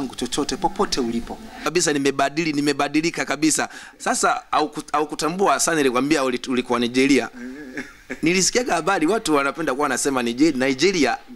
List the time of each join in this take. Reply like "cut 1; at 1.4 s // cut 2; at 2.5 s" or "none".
cut 1; at 1.7 s